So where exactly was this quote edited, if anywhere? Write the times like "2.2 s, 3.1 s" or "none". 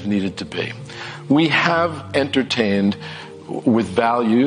none